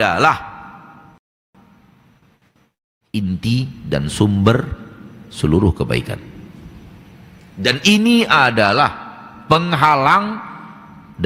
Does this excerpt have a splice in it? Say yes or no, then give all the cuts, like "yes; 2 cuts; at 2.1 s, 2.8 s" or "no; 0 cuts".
no; 0 cuts